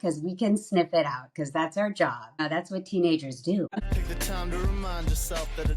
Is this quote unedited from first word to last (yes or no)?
no